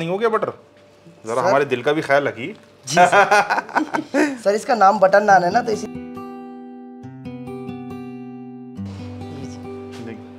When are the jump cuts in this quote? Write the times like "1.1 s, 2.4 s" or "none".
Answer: none